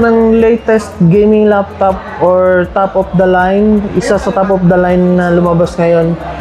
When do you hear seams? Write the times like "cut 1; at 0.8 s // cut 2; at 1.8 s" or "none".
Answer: none